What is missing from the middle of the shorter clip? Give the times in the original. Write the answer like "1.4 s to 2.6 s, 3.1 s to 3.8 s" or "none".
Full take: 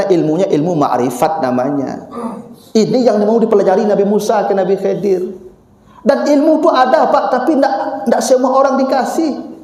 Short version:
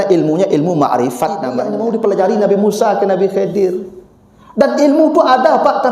1.7 s to 3.1 s